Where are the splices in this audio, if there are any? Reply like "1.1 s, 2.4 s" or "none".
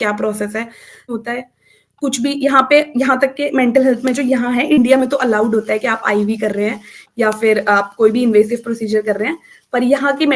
1.1 s